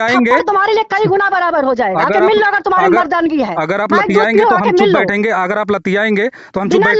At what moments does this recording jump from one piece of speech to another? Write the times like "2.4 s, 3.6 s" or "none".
none